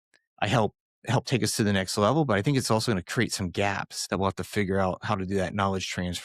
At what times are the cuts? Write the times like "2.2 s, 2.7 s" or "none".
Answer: 3.9 s